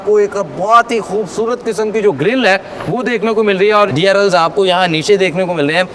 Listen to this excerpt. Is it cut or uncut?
cut